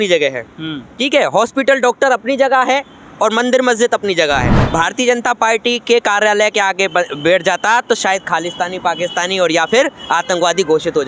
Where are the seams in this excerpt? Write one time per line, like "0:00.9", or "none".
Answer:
0:04.5